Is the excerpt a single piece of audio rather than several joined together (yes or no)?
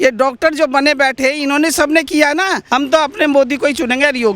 no